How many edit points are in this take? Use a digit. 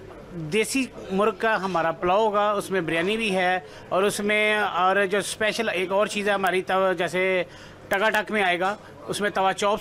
0